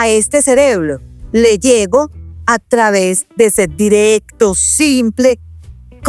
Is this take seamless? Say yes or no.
yes